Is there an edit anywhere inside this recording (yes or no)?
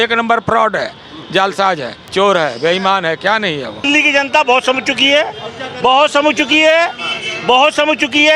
yes